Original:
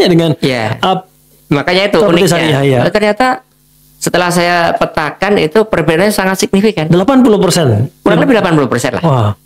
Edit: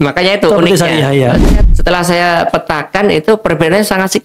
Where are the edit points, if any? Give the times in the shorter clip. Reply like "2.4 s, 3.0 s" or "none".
1.4 s